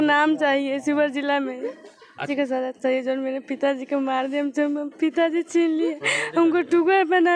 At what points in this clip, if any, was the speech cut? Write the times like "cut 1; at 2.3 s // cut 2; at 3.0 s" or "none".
cut 1; at 2.3 s